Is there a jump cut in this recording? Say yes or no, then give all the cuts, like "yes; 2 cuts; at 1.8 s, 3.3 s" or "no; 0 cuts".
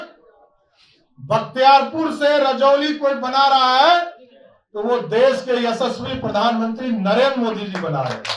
no; 0 cuts